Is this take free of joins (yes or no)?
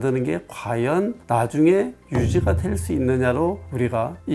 yes